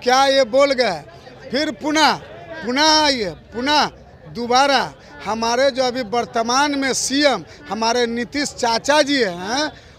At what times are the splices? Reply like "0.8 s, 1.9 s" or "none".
none

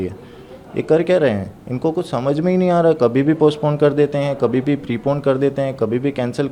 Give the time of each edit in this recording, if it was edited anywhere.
none

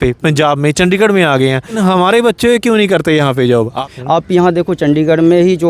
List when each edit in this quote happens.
1.8 s, 3.8 s

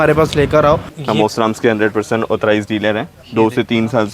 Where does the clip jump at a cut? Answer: 0.9 s, 3.2 s

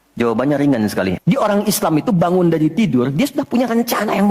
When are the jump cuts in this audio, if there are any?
1.2 s

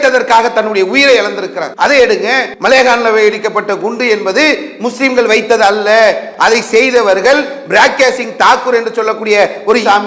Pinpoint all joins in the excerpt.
1.6 s, 2.5 s, 6.3 s

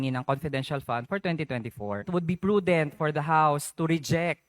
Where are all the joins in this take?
2.0 s

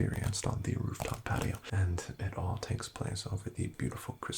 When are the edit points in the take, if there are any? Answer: 1.6 s

